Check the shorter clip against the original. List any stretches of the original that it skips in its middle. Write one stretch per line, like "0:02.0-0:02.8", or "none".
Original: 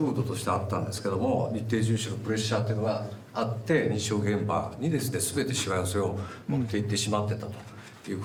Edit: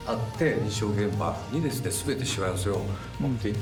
none